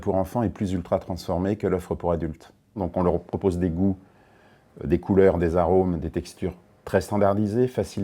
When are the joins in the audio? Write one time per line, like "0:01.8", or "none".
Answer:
0:02.7